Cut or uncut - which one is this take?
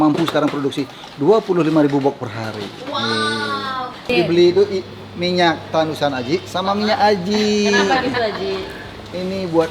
cut